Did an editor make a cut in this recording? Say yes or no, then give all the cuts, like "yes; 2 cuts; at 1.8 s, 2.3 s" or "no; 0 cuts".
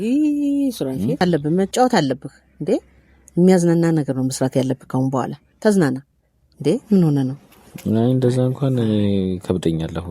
yes; 1 cut; at 1.2 s